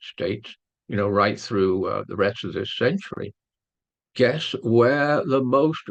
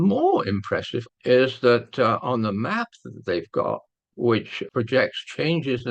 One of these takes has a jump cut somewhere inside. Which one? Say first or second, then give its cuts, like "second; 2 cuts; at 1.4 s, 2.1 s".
second; 2 cuts; at 1.0 s, 4.6 s